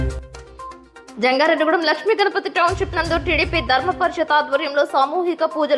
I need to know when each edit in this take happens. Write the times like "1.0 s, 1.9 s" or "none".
0.9 s